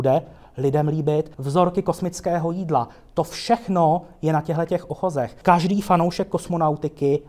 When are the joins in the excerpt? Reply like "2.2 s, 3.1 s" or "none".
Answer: 1.4 s, 5.3 s